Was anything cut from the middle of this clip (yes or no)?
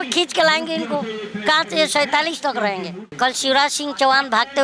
yes